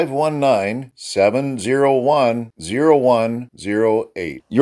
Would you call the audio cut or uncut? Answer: uncut